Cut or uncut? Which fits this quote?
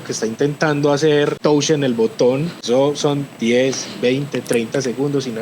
cut